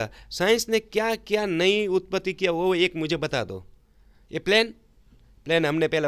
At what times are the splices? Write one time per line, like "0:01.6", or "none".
none